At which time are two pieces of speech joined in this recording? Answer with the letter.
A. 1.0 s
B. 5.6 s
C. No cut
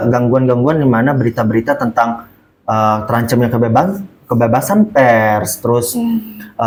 C